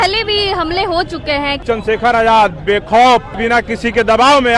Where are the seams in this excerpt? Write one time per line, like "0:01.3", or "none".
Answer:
0:01.6
0:03.3